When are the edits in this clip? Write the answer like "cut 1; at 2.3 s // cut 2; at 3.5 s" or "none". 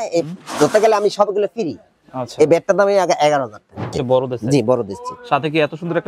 cut 1; at 4.0 s